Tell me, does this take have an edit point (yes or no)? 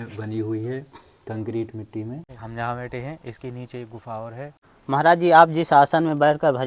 yes